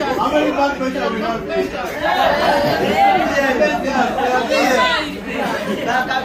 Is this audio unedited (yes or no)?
yes